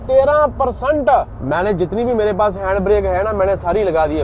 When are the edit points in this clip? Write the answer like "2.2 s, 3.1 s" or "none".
none